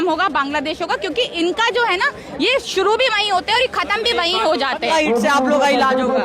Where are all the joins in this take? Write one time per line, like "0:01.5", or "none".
0:04.9

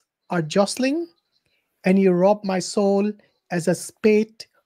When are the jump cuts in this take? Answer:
none

